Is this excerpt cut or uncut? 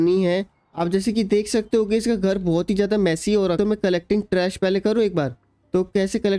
cut